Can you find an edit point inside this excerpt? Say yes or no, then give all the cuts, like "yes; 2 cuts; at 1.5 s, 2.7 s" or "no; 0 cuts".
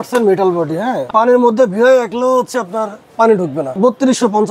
yes; 2 cuts; at 1.1 s, 3.8 s